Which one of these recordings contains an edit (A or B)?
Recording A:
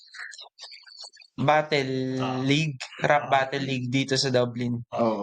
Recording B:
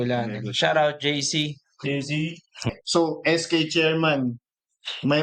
B